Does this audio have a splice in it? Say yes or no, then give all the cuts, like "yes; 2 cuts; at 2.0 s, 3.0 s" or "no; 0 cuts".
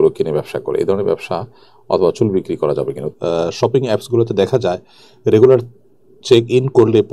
yes; 1 cut; at 3.1 s